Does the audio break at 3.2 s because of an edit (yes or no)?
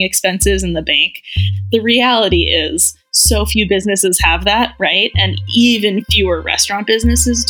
no